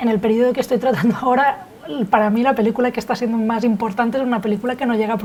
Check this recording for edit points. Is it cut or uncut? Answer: uncut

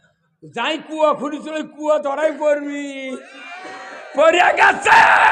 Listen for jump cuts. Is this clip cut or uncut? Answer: uncut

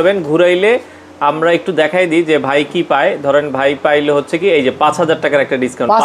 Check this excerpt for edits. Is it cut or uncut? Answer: uncut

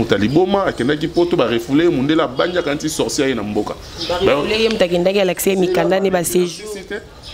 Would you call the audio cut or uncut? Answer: uncut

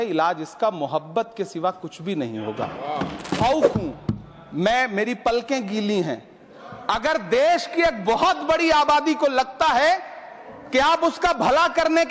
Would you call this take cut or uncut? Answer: cut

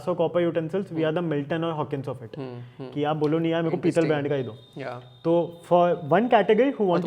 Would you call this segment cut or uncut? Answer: uncut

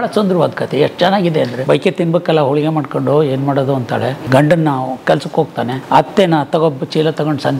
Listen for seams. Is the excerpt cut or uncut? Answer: cut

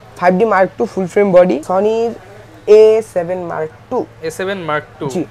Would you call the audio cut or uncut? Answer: cut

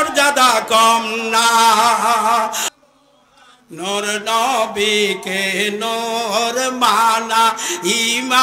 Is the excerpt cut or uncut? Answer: cut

